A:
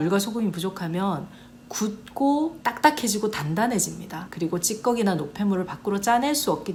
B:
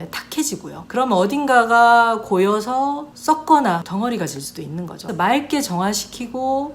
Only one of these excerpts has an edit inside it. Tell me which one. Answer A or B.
B